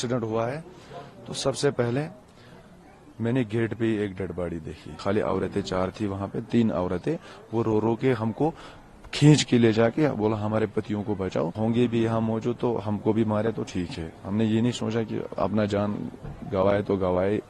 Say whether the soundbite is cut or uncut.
cut